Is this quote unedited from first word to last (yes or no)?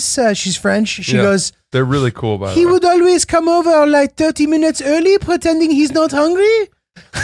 yes